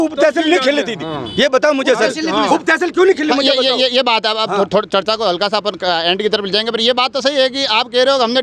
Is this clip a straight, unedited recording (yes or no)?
yes